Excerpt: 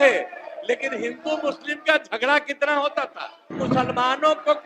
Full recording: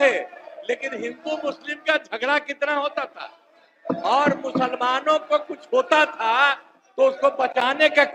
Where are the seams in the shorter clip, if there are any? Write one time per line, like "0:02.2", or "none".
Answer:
0:03.6